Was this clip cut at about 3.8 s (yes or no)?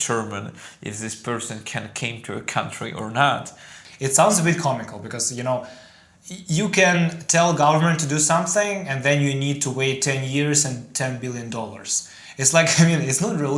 yes